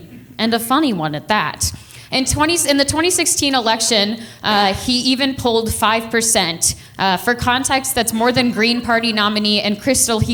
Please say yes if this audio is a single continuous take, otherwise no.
yes